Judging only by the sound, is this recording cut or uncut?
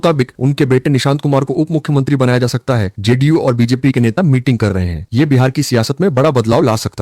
uncut